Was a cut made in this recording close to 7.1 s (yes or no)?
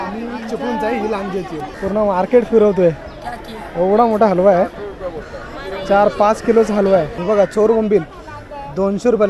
yes